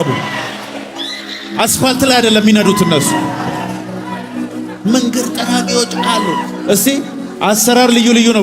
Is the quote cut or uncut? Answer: uncut